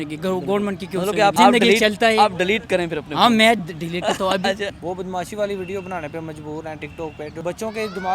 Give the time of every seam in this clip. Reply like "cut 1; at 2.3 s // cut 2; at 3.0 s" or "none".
cut 1; at 1.4 s // cut 2; at 4.7 s // cut 3; at 7.4 s